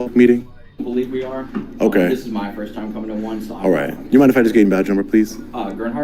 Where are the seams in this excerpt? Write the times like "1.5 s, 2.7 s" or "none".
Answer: none